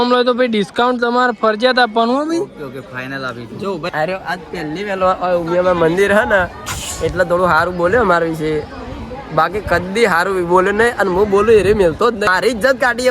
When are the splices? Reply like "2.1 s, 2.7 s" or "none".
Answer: 3.9 s, 12.3 s